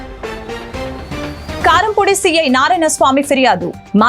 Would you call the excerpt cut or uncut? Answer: cut